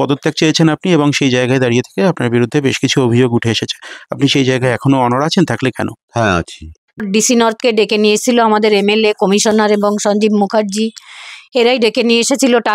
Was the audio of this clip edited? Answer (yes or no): yes